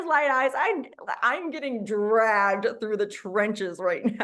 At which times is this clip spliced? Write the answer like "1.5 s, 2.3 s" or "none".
none

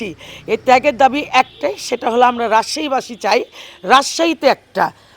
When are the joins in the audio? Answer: none

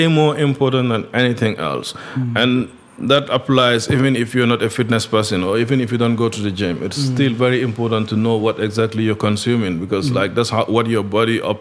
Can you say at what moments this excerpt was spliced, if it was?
none

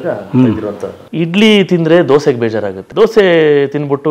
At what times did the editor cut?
0.9 s, 2.8 s

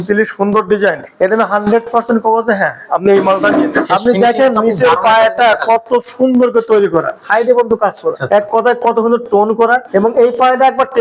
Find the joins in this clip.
1.1 s, 3.8 s, 7.2 s, 8.2 s, 9.8 s

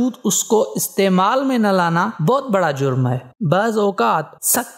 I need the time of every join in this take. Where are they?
3.2 s

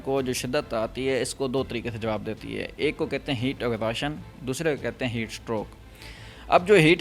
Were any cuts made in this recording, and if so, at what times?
none

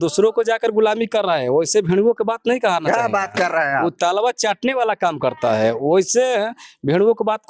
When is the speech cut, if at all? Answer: none

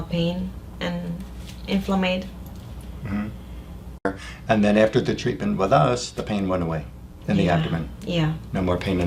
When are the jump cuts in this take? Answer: 4.1 s

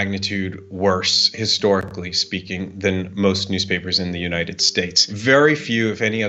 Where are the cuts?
5.0 s

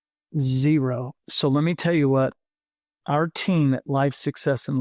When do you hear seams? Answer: none

